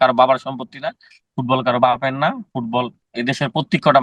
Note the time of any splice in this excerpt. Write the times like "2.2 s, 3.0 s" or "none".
3.0 s